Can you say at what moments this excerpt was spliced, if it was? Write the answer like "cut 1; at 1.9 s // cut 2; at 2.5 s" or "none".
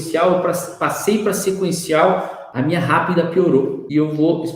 cut 1; at 2.4 s